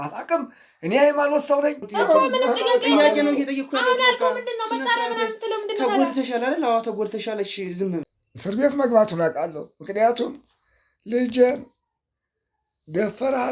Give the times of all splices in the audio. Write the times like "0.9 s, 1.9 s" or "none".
1.8 s, 8.0 s